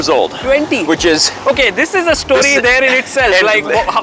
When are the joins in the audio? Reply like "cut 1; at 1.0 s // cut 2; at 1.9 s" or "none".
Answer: none